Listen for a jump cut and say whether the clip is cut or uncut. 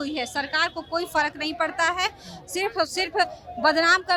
uncut